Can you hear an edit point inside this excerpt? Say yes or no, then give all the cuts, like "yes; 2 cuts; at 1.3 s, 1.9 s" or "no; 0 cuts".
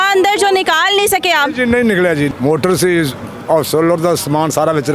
yes; 1 cut; at 2.3 s